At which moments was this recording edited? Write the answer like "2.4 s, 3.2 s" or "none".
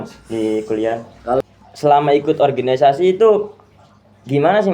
1.4 s

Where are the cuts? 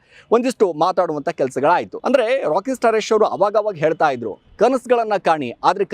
1.9 s

